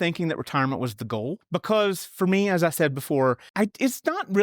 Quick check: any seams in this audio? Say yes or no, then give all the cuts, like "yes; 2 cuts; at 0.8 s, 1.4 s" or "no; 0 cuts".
yes; 2 cuts; at 1.4 s, 3.5 s